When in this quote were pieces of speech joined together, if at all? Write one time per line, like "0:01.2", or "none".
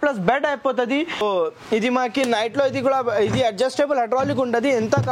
0:01.2